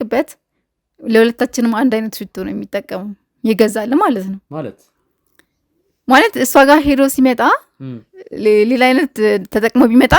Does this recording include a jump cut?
no; 0 cuts

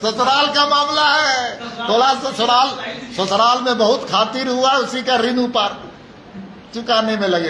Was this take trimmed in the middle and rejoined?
no; 0 cuts

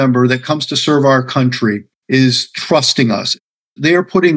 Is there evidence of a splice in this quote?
yes; 1 cut; at 1.9 s

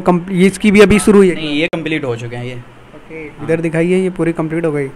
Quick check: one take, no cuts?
yes; 0 cuts

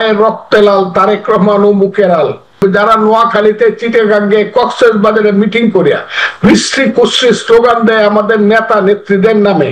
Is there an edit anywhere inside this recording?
yes; 1 cut; at 2.6 s

